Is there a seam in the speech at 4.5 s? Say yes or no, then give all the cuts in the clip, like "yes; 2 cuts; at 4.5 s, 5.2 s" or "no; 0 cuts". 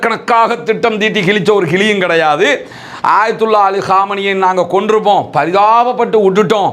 no; 1 cut; at 2.8 s